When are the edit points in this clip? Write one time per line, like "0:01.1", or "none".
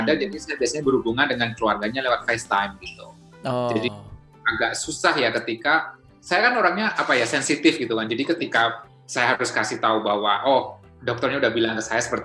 none